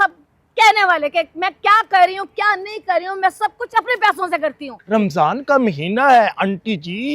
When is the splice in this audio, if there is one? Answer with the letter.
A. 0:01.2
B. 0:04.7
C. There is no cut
B